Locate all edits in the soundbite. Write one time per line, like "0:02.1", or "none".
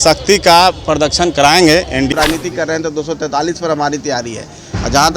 0:02.1

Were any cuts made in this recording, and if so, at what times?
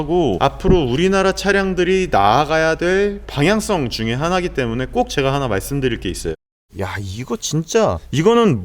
0:06.4

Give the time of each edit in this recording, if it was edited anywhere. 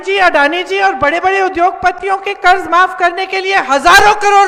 none

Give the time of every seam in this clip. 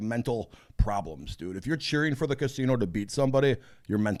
none

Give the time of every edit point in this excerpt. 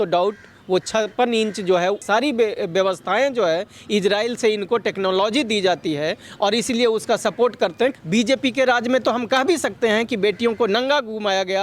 0:02.0
0:07.9

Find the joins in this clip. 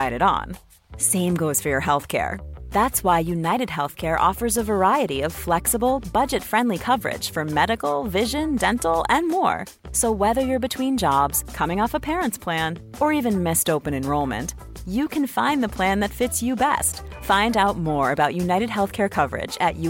none

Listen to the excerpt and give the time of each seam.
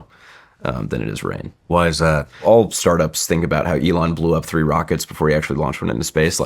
0:02.4

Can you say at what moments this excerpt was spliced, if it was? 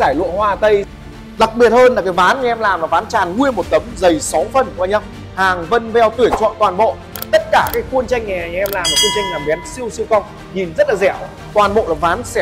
0:01.1
0:11.4

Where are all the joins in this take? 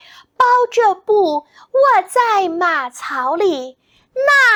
none

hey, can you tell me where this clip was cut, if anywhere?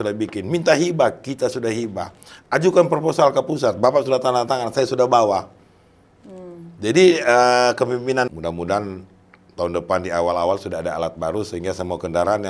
0:08.3

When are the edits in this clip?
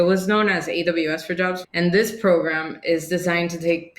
0:01.6

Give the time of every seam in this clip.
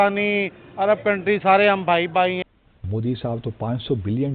0:02.4

